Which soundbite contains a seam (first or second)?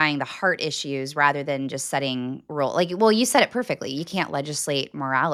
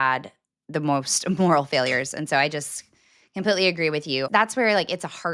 second